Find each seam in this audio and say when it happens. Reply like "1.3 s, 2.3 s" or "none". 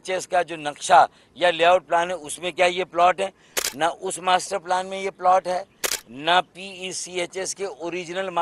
none

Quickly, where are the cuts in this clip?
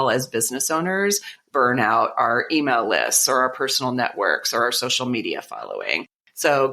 1.4 s

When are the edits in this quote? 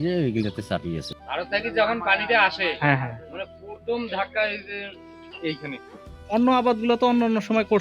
1.2 s, 6.3 s

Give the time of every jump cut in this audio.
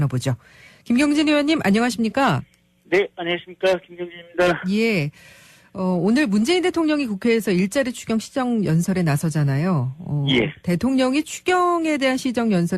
2.6 s

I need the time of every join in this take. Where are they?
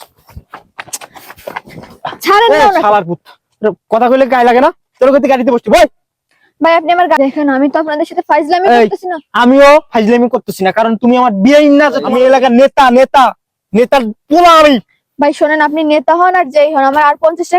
7.2 s, 12.1 s

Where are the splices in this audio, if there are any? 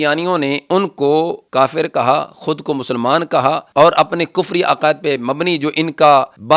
1.4 s

